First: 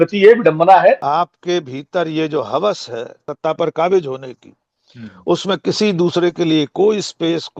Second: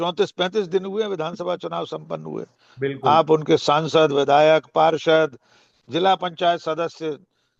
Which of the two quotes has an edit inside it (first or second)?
first